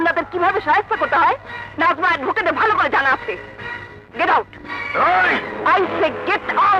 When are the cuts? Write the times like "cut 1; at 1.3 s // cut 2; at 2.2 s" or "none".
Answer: none